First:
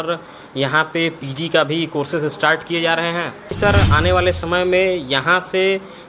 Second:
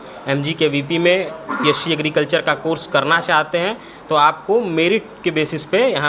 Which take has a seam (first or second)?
first